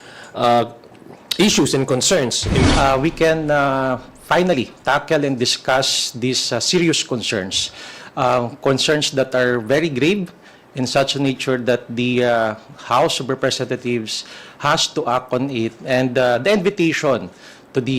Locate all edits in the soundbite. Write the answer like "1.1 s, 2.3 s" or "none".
2.6 s